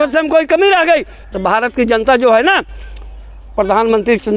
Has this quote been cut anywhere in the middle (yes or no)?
no